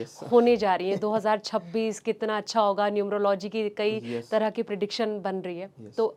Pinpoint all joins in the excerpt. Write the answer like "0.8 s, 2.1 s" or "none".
none